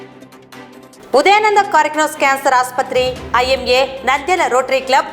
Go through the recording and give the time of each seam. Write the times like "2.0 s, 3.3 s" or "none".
0.9 s